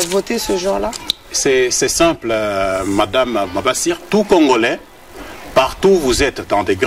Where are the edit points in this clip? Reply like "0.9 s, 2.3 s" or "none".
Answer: 4.0 s